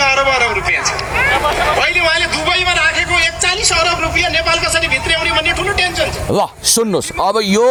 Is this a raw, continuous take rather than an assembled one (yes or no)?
yes